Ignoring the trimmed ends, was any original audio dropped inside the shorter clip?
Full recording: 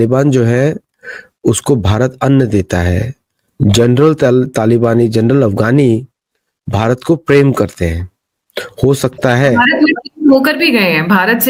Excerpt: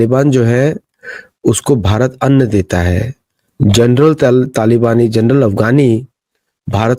no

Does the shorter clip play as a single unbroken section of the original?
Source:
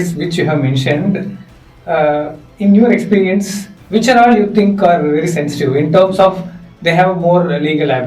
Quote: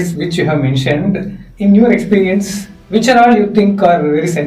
no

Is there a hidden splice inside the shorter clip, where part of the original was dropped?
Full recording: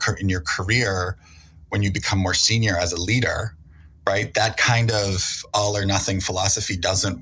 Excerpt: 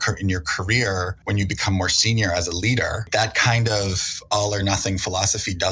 yes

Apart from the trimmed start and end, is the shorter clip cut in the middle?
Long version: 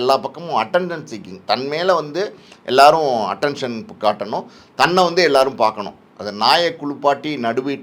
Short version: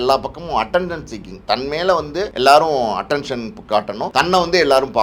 yes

